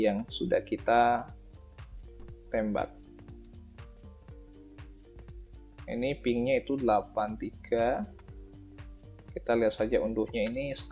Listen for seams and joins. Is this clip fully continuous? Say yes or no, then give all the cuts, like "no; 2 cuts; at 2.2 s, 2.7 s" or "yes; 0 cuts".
no; 2 cuts; at 3.0 s, 5.7 s